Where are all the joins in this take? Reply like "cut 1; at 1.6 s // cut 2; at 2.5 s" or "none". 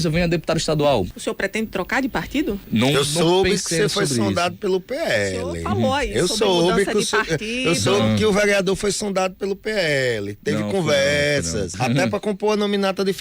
cut 1; at 1.1 s // cut 2; at 11.7 s